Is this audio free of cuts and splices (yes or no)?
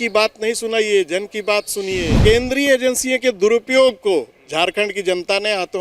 no